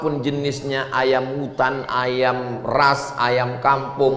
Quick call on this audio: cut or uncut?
uncut